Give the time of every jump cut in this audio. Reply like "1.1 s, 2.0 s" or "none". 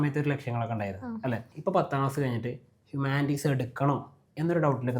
1.5 s